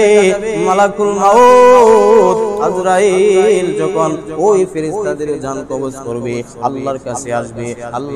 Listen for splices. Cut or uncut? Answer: uncut